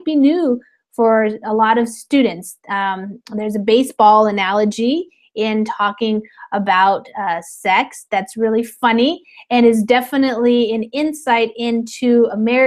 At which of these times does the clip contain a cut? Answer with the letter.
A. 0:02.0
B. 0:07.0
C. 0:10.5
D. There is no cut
D